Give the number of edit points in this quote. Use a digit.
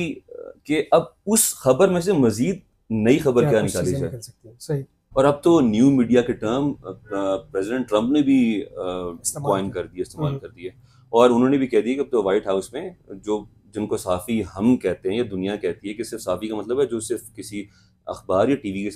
1